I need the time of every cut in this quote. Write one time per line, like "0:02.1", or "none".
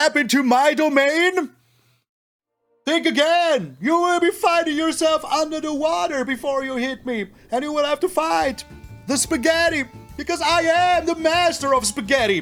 none